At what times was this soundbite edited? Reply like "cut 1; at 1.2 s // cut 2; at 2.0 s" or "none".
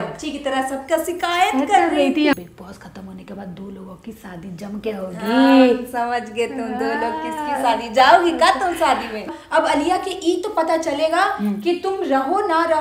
cut 1; at 2.3 s // cut 2; at 9.3 s